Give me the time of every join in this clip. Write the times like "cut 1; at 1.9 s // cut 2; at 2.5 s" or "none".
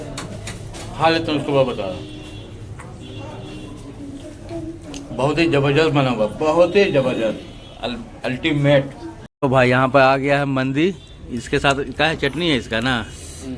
cut 1; at 9.2 s